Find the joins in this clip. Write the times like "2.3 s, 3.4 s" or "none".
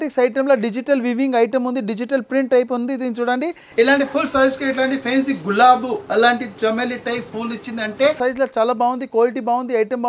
3.6 s, 8.2 s